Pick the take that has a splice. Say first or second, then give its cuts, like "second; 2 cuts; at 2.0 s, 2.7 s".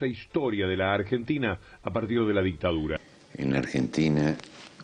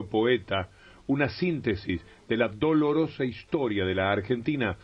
first; 1 cut; at 3.1 s